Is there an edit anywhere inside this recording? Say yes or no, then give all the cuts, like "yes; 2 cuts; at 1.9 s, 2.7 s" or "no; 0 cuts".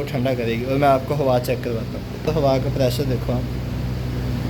yes; 1 cut; at 2.3 s